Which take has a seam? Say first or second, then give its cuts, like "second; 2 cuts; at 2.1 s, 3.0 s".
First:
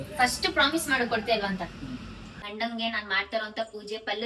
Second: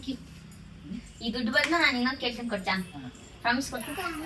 first; 1 cut; at 2.4 s